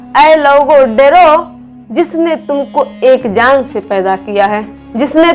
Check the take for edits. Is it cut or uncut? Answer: uncut